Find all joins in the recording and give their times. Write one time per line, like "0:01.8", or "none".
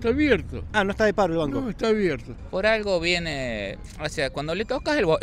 0:02.3